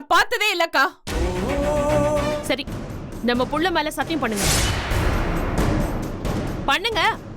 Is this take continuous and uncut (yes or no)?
no